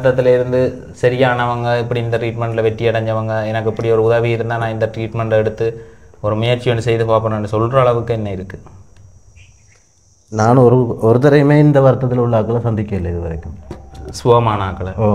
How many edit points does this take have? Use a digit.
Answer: 0